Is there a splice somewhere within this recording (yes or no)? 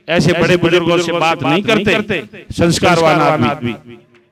no